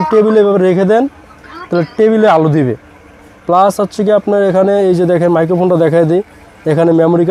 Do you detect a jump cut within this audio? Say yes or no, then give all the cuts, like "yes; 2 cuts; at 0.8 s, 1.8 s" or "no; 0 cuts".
no; 0 cuts